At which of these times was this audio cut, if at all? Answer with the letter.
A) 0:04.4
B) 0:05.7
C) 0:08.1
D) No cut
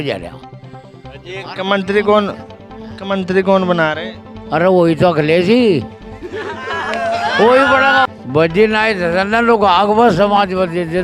C